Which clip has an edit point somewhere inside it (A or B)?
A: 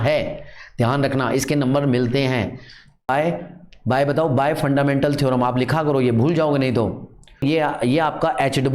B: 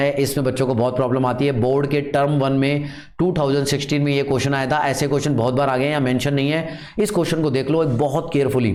A